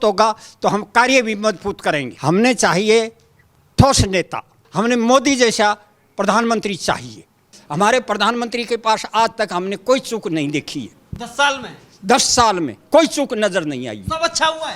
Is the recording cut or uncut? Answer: cut